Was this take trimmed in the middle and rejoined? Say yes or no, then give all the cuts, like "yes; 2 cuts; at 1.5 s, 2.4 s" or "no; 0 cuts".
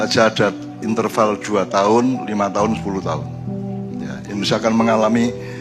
no; 0 cuts